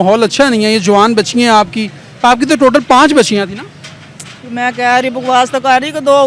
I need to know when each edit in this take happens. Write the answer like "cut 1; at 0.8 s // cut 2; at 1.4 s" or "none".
none